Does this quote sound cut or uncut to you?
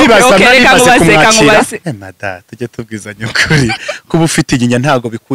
cut